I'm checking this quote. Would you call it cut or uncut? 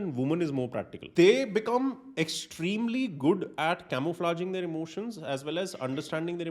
cut